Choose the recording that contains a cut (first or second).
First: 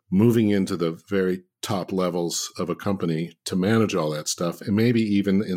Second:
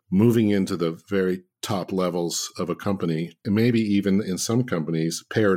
second